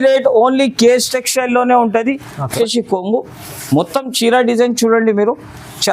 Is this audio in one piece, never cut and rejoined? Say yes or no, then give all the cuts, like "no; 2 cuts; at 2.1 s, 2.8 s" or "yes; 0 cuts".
no; 1 cut; at 2.5 s